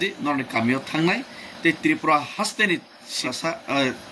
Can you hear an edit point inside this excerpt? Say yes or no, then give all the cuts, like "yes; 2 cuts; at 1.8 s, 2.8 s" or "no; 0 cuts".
yes; 1 cut; at 3.2 s